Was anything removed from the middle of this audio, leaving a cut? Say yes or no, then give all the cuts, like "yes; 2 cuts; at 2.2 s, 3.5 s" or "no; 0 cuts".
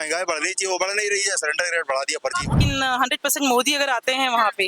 yes; 1 cut; at 2.6 s